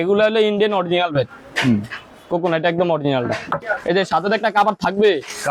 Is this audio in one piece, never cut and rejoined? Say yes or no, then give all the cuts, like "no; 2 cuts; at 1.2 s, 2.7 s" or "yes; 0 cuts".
no; 1 cut; at 3.6 s